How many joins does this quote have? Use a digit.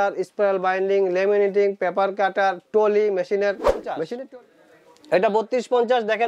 1